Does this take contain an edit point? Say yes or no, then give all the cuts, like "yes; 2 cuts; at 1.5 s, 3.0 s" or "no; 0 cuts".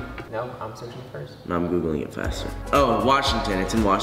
yes; 1 cut; at 1.2 s